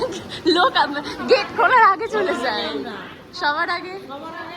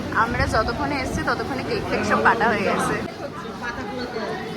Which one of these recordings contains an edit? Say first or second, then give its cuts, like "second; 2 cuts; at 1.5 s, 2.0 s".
second; 1 cut; at 3.0 s